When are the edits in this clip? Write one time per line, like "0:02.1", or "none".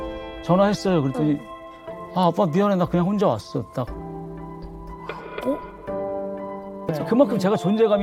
0:06.9